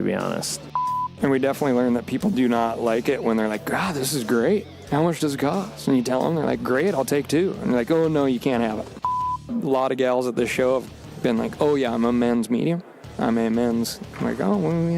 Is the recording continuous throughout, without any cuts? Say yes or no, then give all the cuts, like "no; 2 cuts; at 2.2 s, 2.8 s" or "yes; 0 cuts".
no; 2 cuts; at 1.0 s, 9.2 s